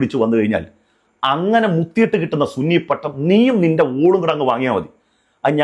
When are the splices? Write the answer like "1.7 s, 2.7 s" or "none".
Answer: none